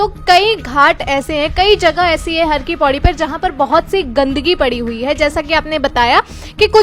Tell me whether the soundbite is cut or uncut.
uncut